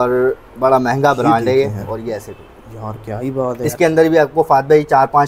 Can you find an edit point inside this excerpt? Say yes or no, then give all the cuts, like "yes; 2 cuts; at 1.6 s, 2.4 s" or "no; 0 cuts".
yes; 2 cuts; at 1.9 s, 3.7 s